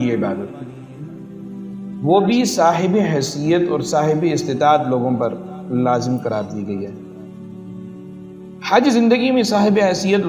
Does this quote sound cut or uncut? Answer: cut